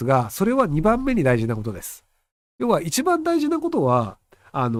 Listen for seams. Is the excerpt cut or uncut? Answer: uncut